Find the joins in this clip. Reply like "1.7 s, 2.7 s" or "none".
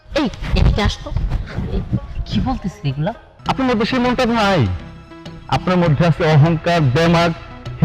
3.3 s

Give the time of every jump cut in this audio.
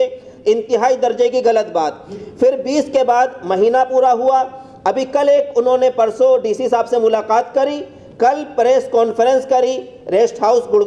none

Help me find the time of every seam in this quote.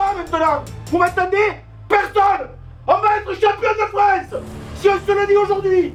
none

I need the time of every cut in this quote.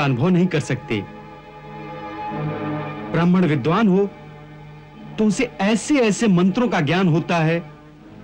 none

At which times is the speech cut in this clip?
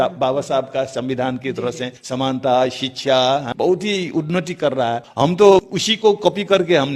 1.9 s, 3.5 s, 5.1 s, 5.8 s

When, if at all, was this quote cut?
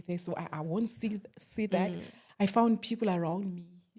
2.2 s

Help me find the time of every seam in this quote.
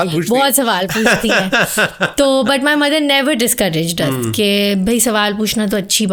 none

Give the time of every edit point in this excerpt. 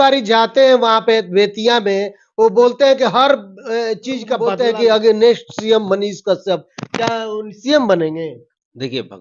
4.4 s

